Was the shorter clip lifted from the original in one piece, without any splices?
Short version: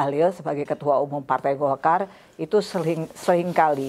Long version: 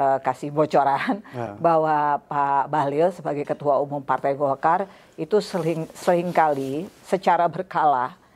yes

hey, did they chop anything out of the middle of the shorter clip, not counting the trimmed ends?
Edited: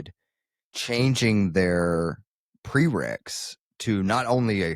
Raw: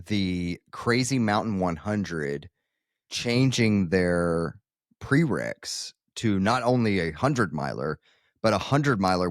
no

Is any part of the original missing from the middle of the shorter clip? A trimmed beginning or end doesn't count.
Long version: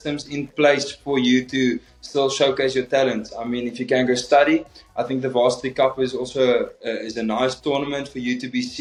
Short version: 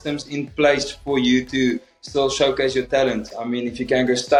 no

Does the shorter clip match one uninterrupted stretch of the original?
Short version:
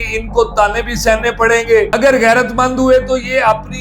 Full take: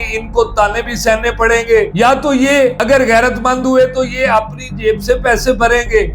no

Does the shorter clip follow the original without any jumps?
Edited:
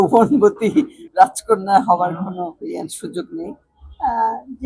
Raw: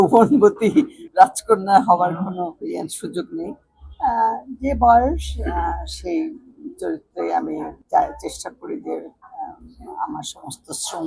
yes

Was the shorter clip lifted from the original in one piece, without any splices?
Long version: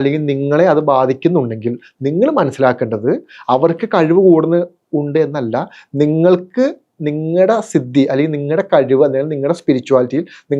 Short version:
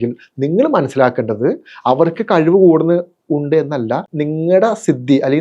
no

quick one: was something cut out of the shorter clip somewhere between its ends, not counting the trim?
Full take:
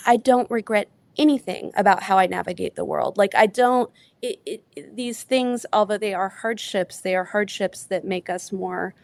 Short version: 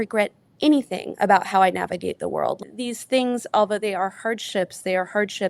yes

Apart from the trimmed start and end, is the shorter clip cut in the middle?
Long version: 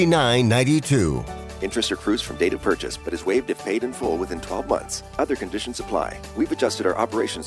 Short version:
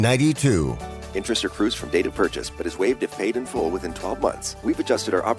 yes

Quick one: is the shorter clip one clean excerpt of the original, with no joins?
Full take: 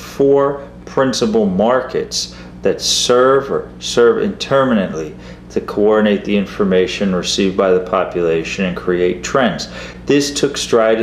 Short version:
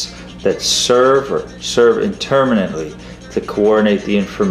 yes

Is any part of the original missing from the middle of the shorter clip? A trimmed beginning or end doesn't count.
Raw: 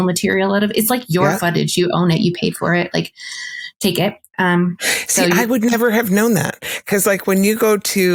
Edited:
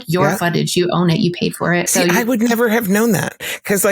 yes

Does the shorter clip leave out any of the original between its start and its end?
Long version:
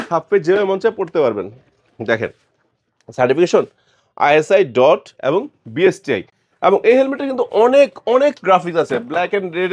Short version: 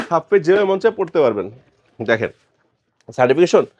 no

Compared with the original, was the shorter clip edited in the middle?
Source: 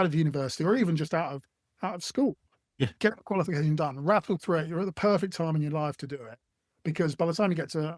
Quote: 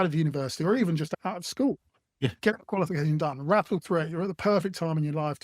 yes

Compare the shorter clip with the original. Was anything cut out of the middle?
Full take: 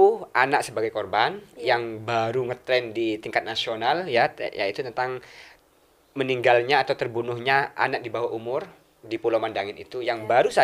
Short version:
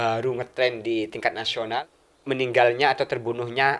yes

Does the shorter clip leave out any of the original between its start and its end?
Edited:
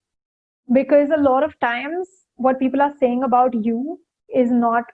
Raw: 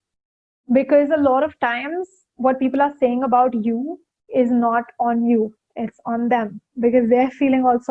no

